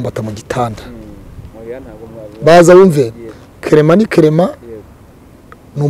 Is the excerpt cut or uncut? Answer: uncut